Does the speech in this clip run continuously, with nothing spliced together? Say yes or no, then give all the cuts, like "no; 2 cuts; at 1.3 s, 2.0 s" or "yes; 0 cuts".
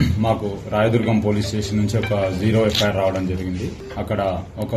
no; 1 cut; at 3.8 s